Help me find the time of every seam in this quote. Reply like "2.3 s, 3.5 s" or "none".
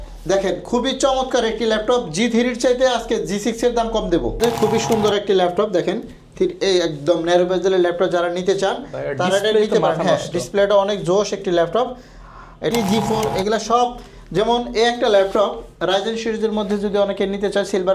4.4 s, 12.7 s

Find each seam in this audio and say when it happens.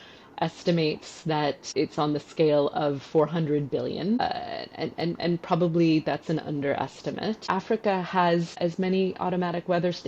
1.6 s, 4.2 s, 7.4 s, 8.5 s

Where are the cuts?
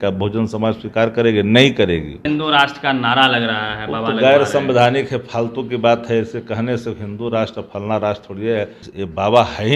2.2 s, 8.8 s

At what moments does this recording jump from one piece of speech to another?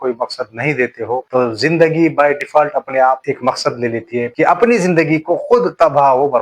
1.3 s, 4.3 s

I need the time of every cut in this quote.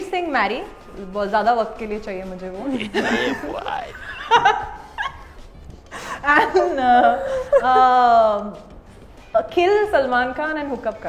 none

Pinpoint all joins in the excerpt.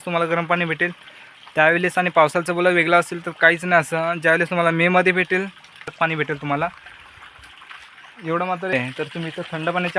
5.9 s, 8.7 s

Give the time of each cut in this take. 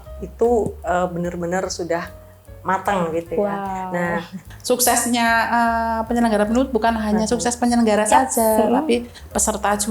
4.4 s

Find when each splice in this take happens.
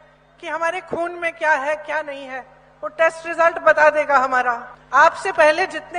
4.7 s

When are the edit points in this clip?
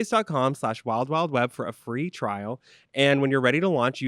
none

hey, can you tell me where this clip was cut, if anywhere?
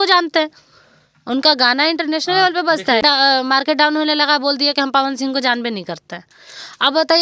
3.0 s

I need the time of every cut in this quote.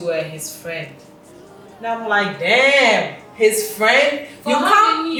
none

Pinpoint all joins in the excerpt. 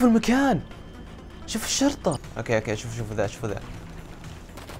2.3 s

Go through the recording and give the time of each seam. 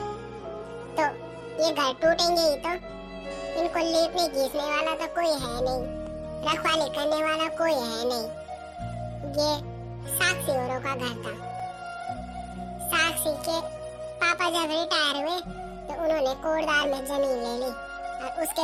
none

